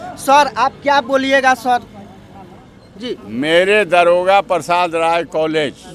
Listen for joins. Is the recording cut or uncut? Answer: uncut